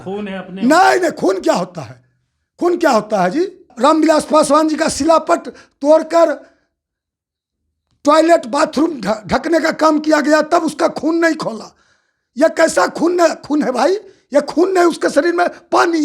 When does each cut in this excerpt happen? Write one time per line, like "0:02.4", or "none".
0:03.7